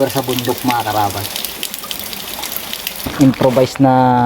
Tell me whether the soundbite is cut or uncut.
cut